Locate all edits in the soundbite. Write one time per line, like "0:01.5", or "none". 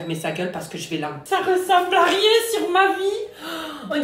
0:01.2